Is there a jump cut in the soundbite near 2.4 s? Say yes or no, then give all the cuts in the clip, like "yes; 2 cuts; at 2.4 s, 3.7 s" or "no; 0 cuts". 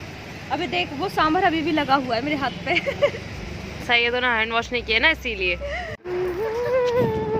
no; 1 cut; at 6.0 s